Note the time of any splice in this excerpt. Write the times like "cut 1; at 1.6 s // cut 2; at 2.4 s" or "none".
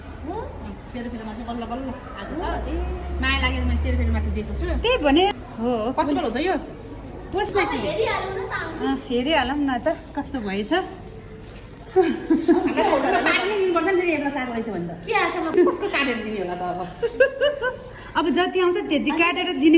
cut 1; at 5.3 s // cut 2; at 7.5 s // cut 3; at 15.5 s